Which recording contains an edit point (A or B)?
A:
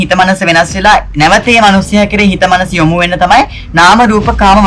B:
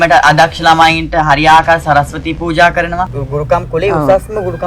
B